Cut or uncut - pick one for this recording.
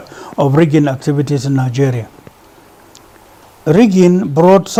uncut